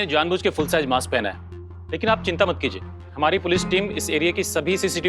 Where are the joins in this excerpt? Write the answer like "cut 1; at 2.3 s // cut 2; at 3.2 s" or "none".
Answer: cut 1; at 1.6 s